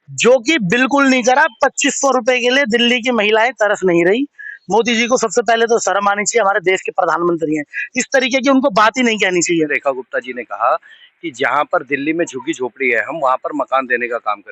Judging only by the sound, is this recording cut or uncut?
cut